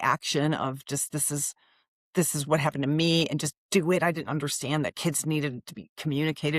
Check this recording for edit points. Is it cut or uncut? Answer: uncut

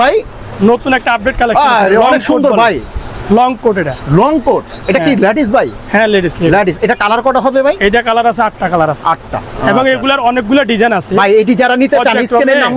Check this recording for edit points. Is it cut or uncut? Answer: uncut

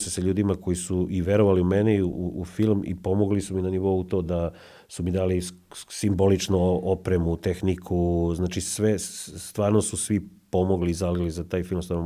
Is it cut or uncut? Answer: uncut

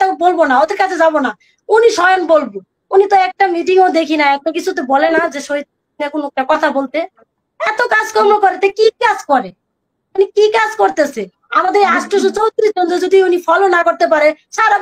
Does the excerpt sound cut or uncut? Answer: uncut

